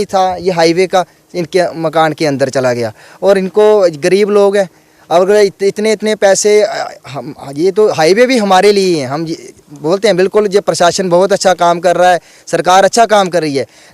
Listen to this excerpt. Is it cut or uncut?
uncut